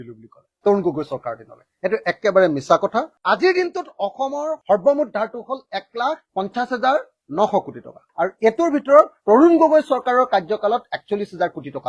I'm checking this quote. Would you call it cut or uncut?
uncut